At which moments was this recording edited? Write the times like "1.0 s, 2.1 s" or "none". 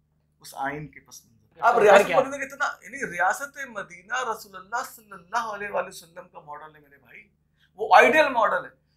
1.7 s